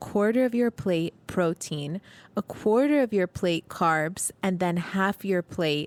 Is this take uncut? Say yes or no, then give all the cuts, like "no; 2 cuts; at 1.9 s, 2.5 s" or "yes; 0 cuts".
yes; 0 cuts